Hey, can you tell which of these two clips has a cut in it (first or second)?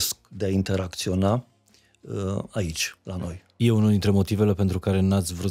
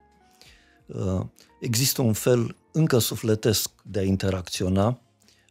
first